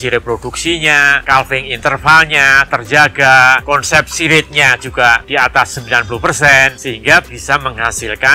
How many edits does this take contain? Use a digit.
3